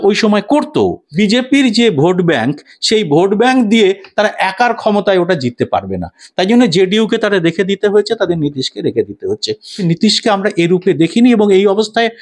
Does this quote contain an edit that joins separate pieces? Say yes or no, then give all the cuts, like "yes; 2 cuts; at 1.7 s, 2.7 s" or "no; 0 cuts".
yes; 2 cuts; at 1.0 s, 9.8 s